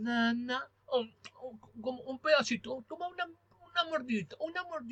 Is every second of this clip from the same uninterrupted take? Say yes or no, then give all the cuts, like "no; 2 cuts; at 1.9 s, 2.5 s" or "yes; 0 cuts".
yes; 0 cuts